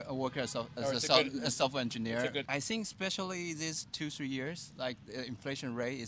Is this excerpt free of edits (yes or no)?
no